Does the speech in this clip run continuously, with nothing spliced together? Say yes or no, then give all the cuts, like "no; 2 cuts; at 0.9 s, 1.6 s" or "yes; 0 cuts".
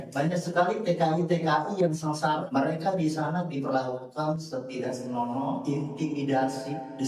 no; 1 cut; at 2.4 s